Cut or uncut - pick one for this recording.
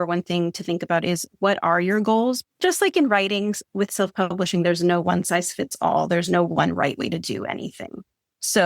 cut